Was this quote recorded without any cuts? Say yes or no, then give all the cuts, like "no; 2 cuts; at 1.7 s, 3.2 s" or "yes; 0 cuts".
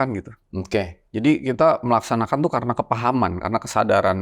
no; 1 cut; at 1.0 s